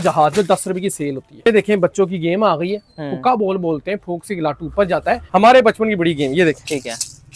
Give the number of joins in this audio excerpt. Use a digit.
2